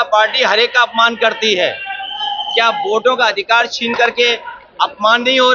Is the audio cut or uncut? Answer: uncut